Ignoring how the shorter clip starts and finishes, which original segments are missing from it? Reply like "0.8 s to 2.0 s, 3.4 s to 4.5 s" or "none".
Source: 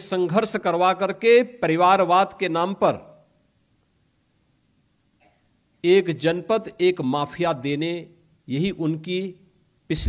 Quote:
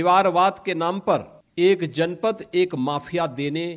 3.1 s to 5.6 s